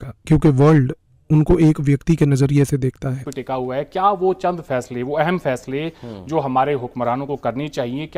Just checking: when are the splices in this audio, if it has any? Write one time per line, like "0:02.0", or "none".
0:03.2